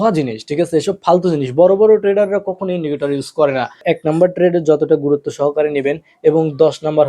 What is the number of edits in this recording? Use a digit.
1